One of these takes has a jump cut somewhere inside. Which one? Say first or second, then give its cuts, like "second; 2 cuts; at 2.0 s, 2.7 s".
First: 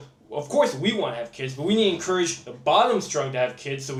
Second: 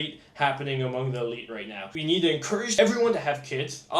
second; 2 cuts; at 1.9 s, 2.7 s